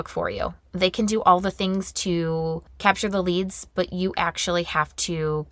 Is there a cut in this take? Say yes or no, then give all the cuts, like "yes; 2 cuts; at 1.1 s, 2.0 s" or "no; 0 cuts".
yes; 1 cut; at 2.7 s